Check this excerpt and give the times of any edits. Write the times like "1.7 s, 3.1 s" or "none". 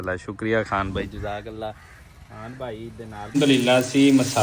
3.2 s